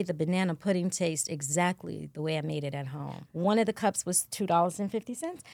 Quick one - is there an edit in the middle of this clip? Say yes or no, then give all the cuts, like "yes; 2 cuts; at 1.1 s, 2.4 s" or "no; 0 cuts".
yes; 1 cut; at 3.2 s